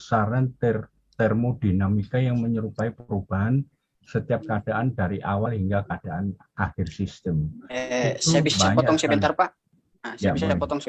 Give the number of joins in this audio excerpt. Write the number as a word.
zero